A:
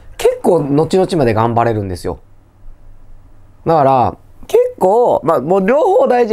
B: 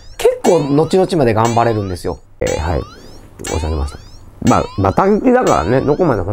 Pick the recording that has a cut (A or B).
B